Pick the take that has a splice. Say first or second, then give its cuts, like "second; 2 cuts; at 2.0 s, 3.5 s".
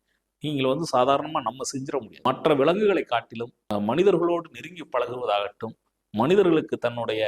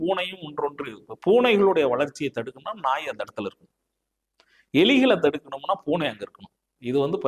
first; 2 cuts; at 2.1 s, 3.6 s